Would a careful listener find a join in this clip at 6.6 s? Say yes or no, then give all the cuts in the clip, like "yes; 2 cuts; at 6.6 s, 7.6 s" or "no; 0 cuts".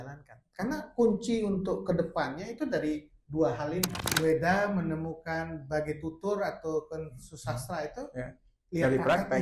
no; 1 cut; at 4.1 s